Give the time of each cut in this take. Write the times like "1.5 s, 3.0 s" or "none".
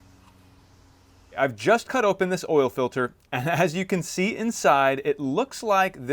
1.4 s